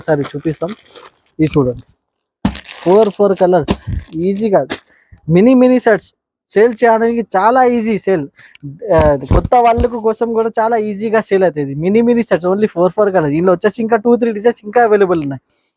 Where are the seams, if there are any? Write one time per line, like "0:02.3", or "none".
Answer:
none